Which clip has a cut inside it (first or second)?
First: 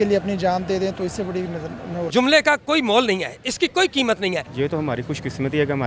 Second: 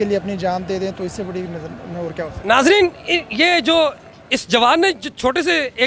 first